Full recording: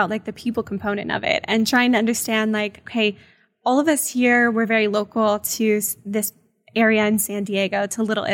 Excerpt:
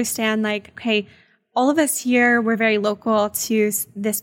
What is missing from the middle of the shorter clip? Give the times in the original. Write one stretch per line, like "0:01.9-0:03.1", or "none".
none